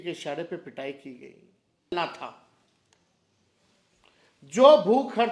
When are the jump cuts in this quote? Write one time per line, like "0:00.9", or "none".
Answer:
0:01.9